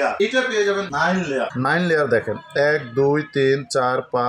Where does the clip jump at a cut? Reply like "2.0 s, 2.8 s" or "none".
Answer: 1.5 s